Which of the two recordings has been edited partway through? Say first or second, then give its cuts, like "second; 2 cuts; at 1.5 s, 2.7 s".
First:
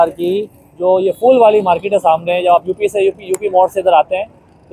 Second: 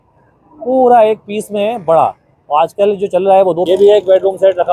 second; 1 cut; at 3.7 s